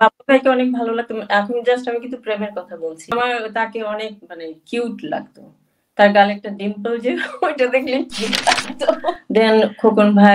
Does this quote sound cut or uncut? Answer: cut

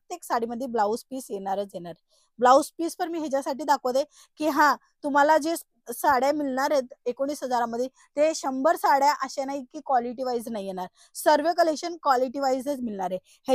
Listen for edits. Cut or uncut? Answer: uncut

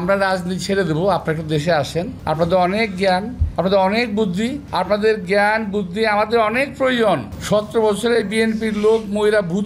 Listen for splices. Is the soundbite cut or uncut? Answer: cut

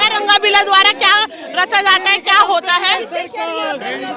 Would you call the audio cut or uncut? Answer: uncut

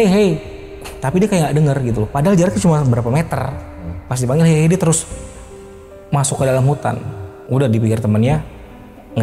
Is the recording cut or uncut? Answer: cut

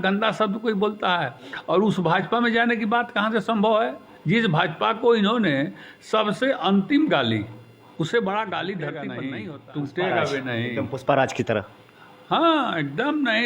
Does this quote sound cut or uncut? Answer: cut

